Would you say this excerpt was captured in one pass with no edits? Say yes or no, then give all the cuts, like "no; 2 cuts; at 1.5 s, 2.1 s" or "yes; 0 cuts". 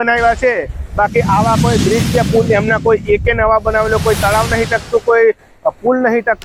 yes; 0 cuts